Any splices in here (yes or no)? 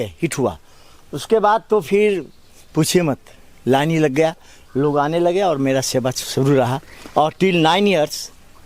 no